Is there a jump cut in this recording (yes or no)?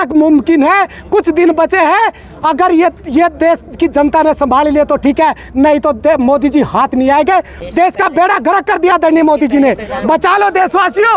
yes